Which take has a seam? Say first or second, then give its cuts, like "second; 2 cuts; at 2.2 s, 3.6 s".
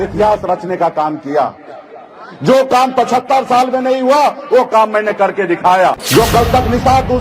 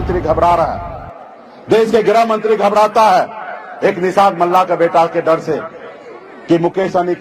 first; 1 cut; at 6.0 s